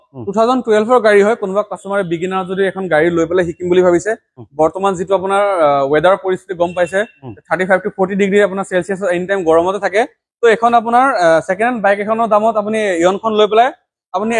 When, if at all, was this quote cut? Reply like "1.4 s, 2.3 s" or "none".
none